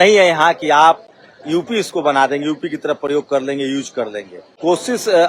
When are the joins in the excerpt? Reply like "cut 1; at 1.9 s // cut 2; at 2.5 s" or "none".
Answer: none